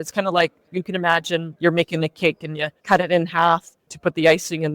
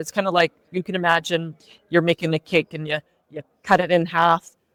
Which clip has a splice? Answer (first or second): first